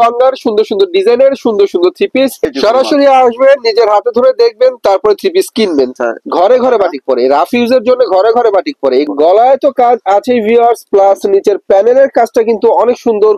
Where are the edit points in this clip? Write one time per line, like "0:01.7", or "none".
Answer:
0:02.5
0:05.9
0:09.1